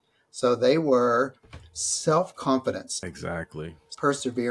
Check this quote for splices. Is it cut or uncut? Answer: cut